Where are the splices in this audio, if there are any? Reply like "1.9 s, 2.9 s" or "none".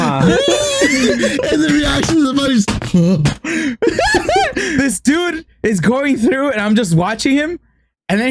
4.9 s